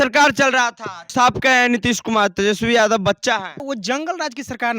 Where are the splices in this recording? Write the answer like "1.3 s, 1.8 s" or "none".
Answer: 1.1 s, 3.6 s

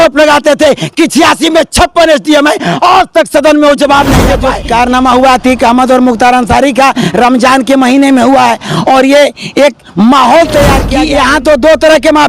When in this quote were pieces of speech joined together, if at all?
4.5 s, 10.9 s

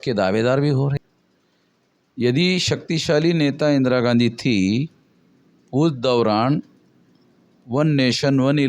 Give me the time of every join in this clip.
1.0 s

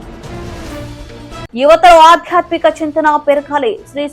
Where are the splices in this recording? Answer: 1.5 s

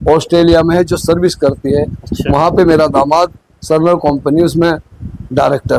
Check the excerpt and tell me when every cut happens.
none

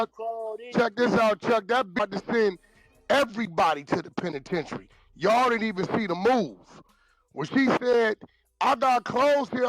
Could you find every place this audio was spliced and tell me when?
0.9 s

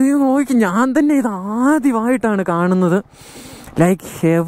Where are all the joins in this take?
none

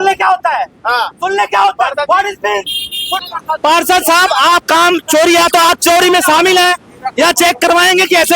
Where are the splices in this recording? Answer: 3.2 s

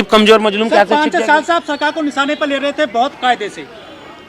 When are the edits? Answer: none

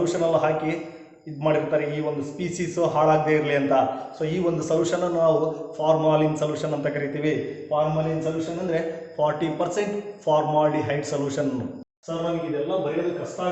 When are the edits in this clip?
11.8 s

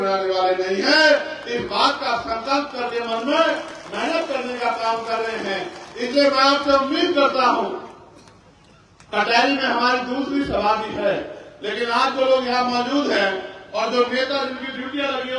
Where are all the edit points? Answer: none

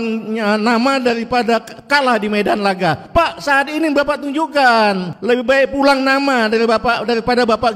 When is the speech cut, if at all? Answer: 1.8 s, 3.0 s, 5.1 s

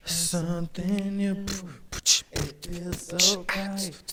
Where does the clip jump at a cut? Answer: none

